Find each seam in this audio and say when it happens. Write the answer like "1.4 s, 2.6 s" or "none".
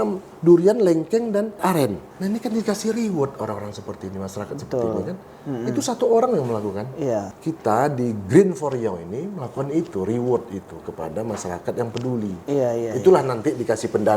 1.8 s, 7.4 s